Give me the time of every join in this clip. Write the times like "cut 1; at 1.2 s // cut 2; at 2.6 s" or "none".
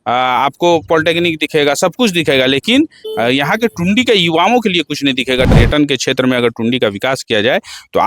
cut 1; at 5.5 s